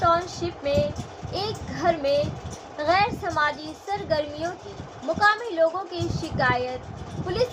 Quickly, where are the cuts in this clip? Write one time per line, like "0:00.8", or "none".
none